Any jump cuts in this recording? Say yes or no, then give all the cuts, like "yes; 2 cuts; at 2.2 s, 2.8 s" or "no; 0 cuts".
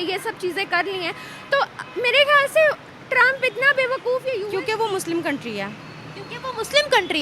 yes; 1 cut; at 4.4 s